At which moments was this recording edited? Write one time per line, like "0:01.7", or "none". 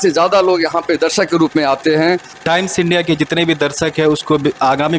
0:02.3